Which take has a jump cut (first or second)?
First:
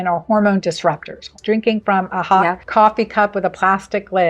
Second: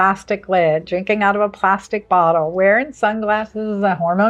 first